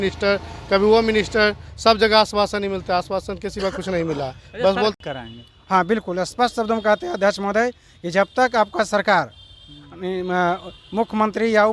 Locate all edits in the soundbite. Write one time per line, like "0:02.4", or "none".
0:04.9